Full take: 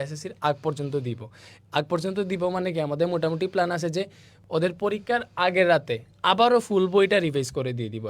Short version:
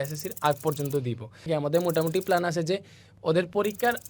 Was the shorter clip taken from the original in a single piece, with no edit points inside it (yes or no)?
no